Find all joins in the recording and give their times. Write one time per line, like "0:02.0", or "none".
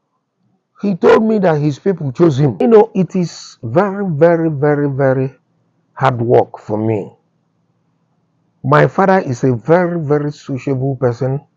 0:02.5

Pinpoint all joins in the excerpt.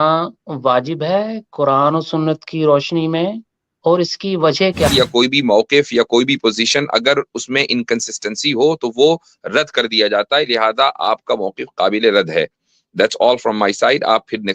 0:04.9

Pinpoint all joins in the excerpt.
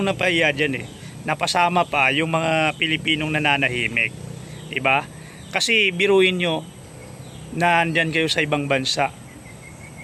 none

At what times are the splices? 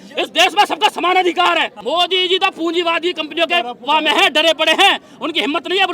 0:01.7

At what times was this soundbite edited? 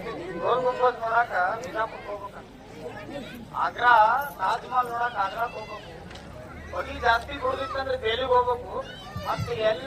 none

